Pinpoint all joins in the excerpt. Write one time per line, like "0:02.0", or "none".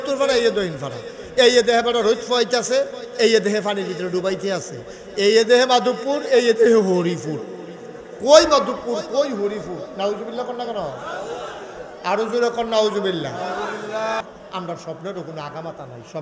0:14.2